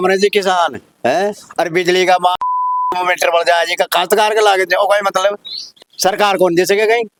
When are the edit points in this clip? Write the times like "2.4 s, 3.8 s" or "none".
none